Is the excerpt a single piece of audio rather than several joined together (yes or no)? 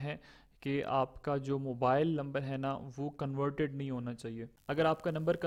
yes